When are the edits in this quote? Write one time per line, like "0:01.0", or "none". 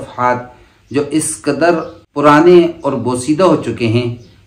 0:02.0